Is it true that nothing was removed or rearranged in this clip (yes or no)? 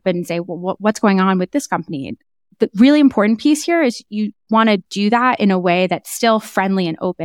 no